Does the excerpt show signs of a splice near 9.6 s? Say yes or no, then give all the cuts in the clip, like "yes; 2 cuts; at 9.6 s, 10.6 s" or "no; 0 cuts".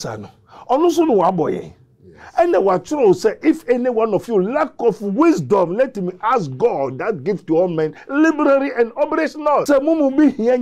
yes; 1 cut; at 9.6 s